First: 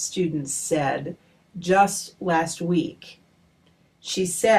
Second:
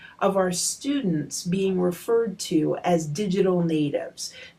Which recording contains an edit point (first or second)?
first